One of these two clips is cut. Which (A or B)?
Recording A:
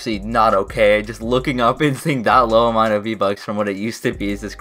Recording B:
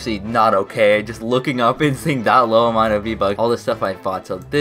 B